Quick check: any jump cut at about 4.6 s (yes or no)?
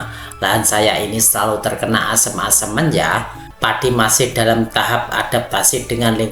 no